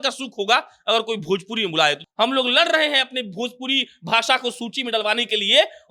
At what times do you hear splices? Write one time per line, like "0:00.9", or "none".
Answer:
0:02.0